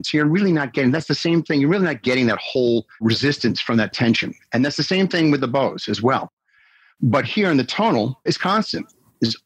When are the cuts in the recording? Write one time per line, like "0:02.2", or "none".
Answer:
0:08.2